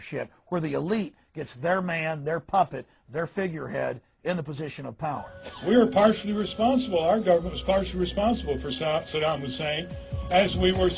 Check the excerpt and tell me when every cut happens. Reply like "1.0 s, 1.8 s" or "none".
5.9 s